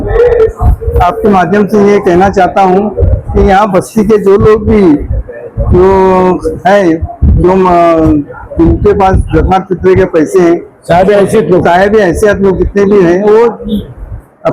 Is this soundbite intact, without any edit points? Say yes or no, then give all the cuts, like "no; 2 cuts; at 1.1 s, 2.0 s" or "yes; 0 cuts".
yes; 0 cuts